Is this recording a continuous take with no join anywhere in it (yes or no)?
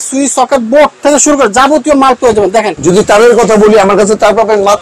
no